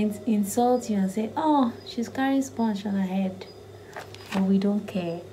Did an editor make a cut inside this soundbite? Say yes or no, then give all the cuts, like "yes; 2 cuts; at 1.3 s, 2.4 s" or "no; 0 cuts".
no; 0 cuts